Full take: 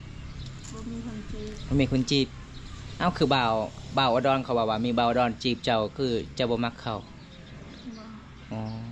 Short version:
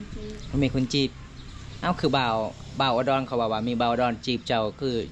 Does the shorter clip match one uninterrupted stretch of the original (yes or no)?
yes